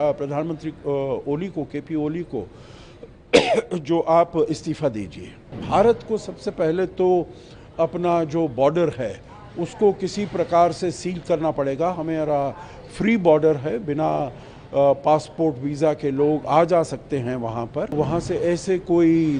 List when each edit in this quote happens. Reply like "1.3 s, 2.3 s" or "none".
5.6 s, 17.9 s